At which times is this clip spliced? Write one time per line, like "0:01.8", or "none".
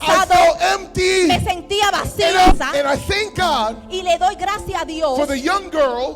0:02.5